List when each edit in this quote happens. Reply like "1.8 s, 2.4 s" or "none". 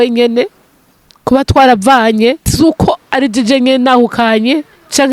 2.4 s